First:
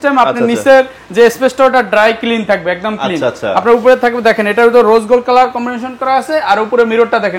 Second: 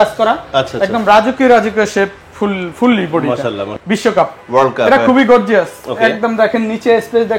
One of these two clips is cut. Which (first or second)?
second